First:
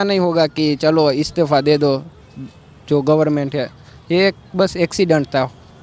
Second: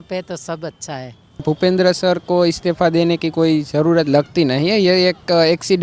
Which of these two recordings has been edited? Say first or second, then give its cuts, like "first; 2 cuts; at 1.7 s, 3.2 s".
second; 1 cut; at 1.4 s